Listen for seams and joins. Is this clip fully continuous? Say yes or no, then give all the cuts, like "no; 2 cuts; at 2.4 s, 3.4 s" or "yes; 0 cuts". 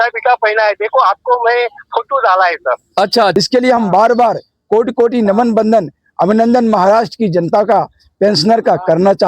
no; 1 cut; at 3.3 s